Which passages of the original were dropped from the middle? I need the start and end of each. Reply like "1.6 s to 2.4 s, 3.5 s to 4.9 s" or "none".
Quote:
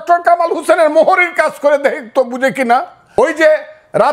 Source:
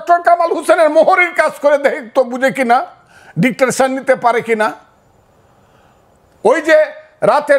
3.0 s to 6.3 s